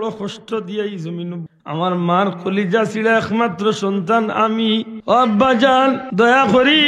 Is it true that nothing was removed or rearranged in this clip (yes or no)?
no